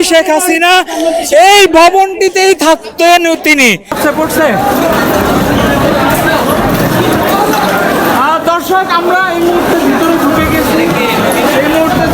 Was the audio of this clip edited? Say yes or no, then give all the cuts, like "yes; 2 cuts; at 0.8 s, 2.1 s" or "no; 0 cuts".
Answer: yes; 1 cut; at 4.0 s